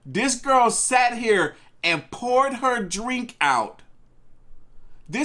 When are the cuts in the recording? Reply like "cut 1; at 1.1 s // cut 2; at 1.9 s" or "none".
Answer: none